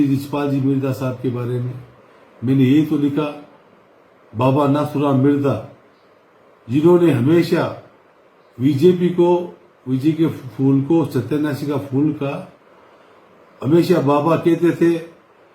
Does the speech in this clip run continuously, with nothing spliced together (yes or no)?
yes